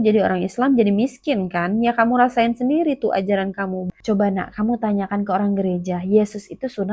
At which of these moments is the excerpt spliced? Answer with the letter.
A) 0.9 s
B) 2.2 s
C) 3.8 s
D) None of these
C